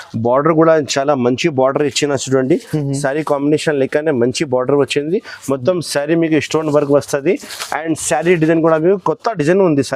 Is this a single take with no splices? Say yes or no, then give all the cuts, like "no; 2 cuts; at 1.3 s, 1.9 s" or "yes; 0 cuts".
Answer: yes; 0 cuts